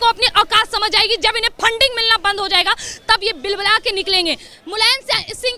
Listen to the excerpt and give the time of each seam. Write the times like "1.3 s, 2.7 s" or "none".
4.5 s